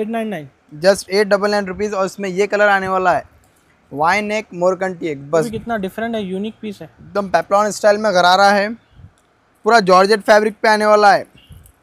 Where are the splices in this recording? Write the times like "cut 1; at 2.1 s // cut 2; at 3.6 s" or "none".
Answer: cut 1; at 5.5 s